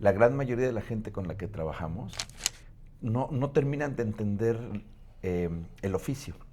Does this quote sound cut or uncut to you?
cut